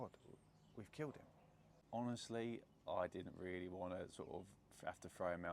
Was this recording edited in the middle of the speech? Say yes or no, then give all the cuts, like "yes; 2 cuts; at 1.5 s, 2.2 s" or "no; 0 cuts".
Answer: yes; 1 cut; at 1.7 s